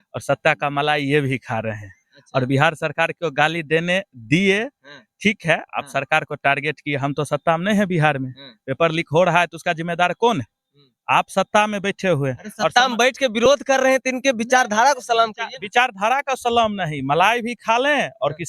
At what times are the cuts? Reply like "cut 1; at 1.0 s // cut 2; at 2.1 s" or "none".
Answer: none